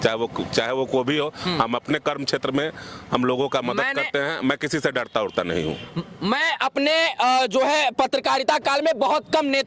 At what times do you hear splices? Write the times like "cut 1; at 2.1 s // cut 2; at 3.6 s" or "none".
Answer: none